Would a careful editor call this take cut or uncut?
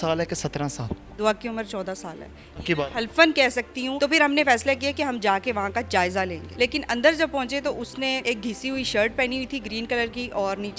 cut